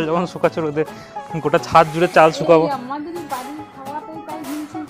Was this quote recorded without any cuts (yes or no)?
yes